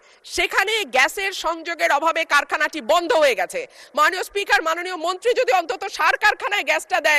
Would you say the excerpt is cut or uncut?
uncut